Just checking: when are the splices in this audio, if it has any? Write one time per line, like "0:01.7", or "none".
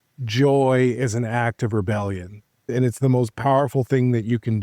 0:02.6